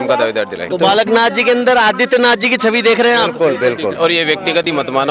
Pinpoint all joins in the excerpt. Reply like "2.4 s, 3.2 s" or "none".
0.7 s, 4.0 s